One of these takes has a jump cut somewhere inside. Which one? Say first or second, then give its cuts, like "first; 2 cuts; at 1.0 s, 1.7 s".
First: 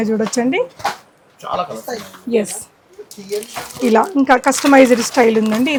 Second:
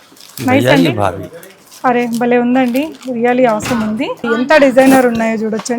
second; 1 cut; at 4.2 s